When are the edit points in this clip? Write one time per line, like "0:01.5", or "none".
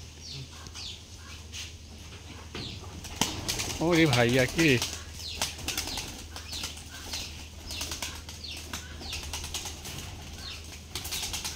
none